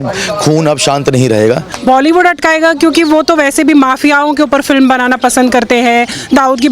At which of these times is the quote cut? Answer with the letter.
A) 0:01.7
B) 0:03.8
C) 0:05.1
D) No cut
A